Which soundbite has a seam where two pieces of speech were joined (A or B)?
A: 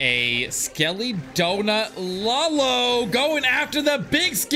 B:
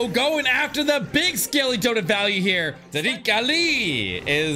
B